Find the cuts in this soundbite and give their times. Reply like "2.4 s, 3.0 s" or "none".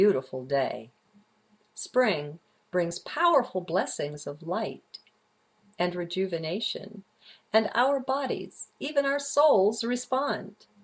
6.8 s